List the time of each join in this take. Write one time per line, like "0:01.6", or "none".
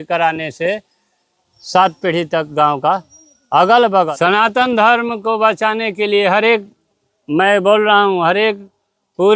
0:04.1